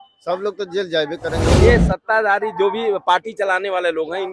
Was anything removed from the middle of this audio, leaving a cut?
yes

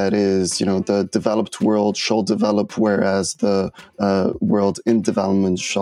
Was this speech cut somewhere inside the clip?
no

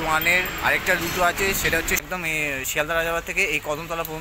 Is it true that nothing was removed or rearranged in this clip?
no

